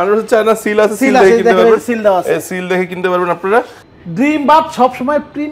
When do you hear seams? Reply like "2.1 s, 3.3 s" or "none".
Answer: 3.8 s